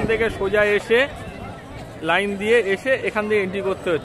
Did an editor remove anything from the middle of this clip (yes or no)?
no